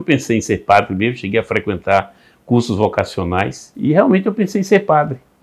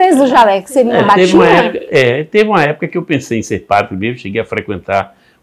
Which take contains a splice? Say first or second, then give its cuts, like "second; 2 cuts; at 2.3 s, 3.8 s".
first; 1 cut; at 3.6 s